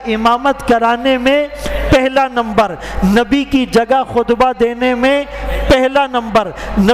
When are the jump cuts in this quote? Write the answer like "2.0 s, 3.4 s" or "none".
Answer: none